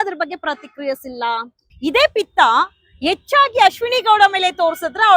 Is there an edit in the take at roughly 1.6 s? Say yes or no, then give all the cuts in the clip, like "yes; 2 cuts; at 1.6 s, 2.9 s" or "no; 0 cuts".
yes; 1 cut; at 1.6 s